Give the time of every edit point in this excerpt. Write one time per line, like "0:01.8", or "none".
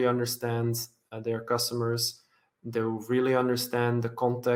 none